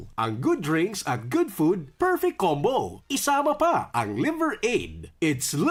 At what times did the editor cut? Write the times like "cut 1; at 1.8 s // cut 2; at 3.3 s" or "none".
none